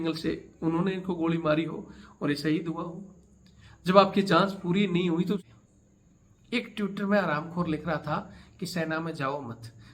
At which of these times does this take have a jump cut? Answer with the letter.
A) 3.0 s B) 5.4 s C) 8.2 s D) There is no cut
B